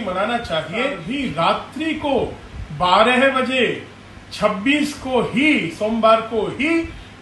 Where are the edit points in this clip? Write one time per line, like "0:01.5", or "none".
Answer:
0:01.0